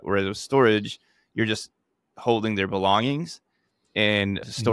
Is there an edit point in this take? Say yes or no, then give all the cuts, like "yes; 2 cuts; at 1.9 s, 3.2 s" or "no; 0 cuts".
no; 0 cuts